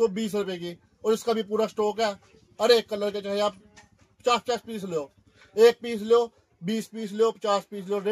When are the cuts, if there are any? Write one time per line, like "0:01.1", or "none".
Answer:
none